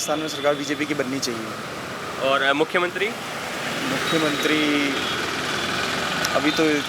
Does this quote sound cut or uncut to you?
uncut